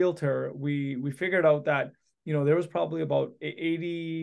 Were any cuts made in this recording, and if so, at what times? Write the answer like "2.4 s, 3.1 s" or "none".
none